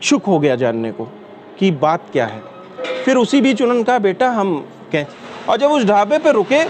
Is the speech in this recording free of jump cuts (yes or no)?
no